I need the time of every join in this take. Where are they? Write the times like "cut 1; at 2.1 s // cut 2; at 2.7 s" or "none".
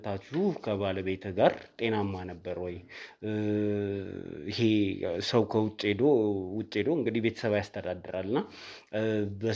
none